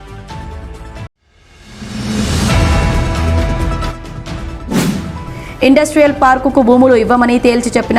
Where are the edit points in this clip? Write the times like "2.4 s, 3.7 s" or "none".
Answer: 1.0 s